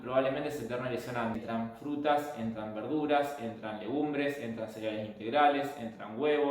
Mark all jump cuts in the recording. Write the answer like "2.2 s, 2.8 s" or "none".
1.4 s